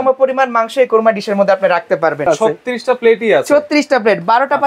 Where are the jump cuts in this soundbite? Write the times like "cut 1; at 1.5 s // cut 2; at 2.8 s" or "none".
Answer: cut 1; at 2.2 s